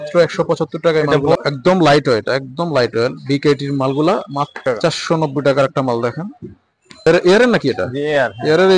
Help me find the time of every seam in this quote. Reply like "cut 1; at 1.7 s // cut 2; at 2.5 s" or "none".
cut 1; at 1.4 s // cut 2; at 4.6 s // cut 3; at 7.1 s